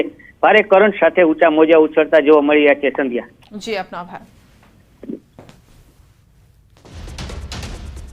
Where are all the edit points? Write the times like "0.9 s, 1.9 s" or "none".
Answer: 3.9 s